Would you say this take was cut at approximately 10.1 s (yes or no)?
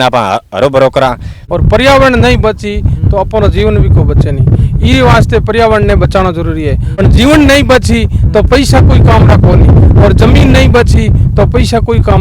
no